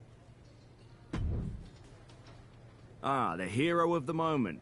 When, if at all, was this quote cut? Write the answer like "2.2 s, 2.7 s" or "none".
1.0 s

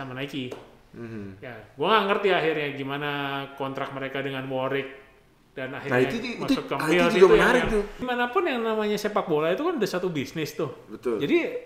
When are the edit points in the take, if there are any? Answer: 8.0 s

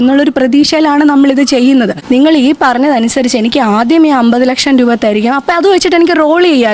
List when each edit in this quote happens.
2.0 s

